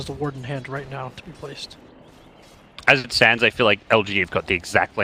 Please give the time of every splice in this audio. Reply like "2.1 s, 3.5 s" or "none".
none